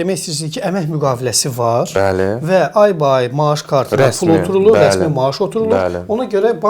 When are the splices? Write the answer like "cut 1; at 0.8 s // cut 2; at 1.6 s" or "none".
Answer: none